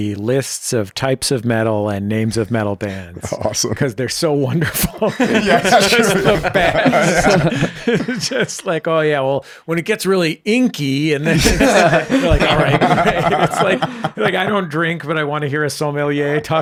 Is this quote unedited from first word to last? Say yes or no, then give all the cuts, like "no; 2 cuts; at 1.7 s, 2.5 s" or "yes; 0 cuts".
yes; 0 cuts